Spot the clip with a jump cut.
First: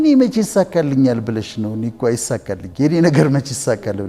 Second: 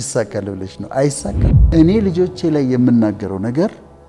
second; 1 cut; at 1.5 s

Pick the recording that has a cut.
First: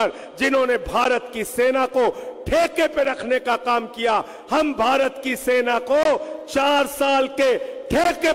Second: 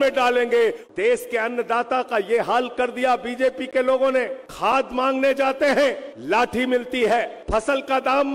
second; 4 cuts; at 0.8 s, 4.4 s, 6.1 s, 7.4 s

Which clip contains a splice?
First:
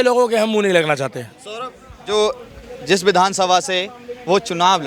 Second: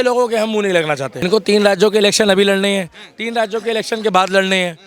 second; 1 cut; at 1.3 s

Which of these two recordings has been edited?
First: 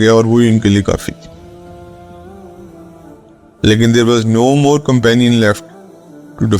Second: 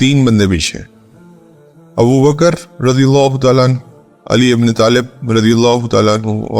first; 2 cuts; at 1.4 s, 3.4 s

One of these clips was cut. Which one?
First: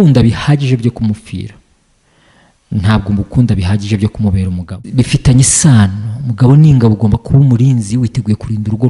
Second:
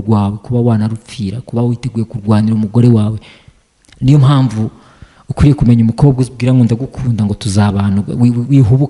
first; 1 cut; at 4.7 s

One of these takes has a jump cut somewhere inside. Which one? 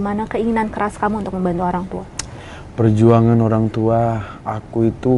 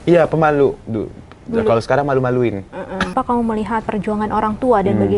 second; 1 cut; at 3.1 s

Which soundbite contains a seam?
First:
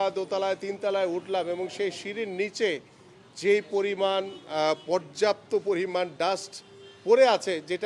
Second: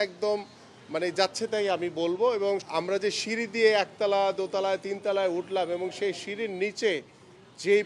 second; 1 cut; at 2.6 s

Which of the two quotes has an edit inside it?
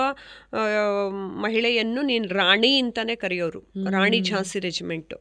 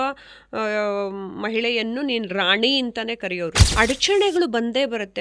second; 1 cut; at 3.6 s

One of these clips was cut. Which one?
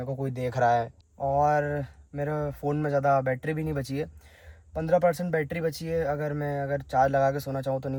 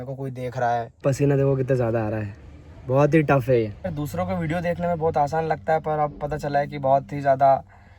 second; 2 cuts; at 0.9 s, 3.8 s

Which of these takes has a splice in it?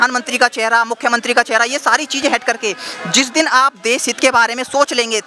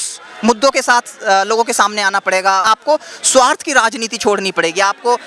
second; 1 cut; at 2.6 s

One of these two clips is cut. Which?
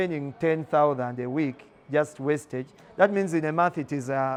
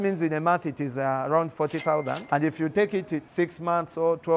second; 2 cuts; at 2.2 s, 3.3 s

